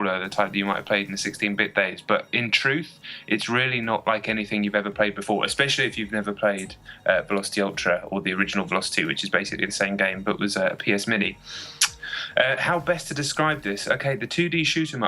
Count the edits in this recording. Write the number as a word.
one